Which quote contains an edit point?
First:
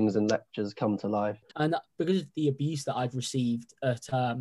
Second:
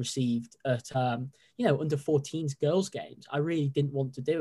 first; 1 cut; at 1.4 s

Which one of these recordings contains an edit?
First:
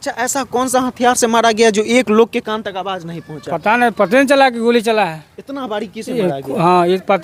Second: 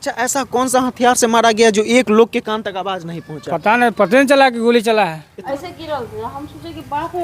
second; 1 cut; at 5.4 s

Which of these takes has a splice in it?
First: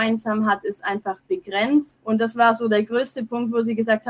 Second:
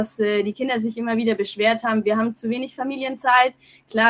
first; 1 cut; at 1.9 s

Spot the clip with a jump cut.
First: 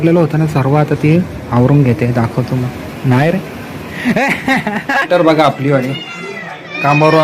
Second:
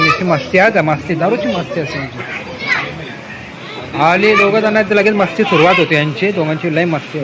first; 1 cut; at 5.0 s

